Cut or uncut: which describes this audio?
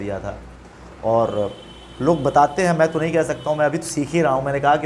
uncut